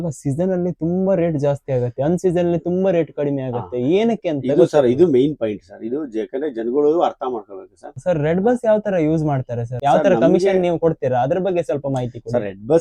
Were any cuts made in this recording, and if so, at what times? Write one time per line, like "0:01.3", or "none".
0:07.9
0:09.6